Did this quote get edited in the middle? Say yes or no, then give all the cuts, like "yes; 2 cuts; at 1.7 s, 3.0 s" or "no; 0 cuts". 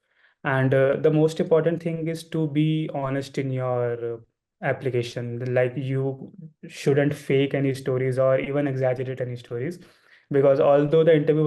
no; 0 cuts